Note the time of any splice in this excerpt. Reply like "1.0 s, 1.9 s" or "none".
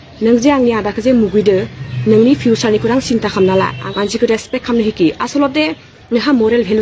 3.8 s